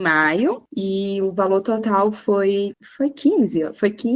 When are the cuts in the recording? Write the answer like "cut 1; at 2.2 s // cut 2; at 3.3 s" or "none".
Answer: none